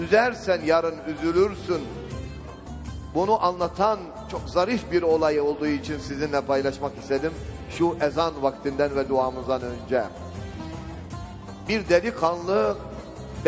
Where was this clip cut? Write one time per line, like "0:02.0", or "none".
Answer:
0:08.4